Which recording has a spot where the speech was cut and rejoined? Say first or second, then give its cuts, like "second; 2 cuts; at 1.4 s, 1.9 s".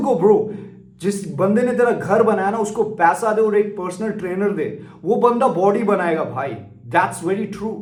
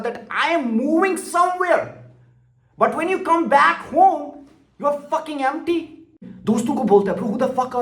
second; 1 cut; at 6.3 s